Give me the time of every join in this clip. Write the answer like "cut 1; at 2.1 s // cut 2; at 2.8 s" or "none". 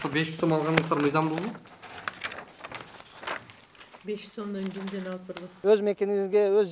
cut 1; at 5.5 s